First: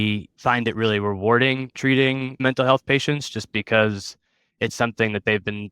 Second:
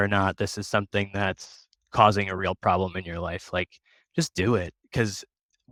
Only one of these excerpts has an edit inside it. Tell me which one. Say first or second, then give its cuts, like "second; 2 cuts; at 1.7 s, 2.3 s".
first; 1 cut; at 1.7 s